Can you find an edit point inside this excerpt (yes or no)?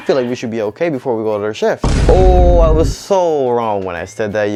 no